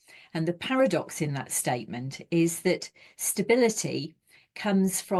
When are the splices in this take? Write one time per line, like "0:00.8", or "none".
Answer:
none